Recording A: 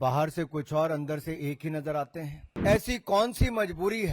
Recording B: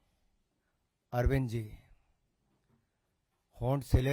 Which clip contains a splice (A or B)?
A